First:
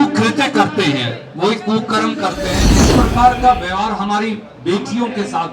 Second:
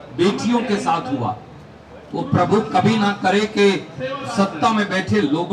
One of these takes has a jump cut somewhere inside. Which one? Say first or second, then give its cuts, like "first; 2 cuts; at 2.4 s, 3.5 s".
first; 1 cut; at 2.7 s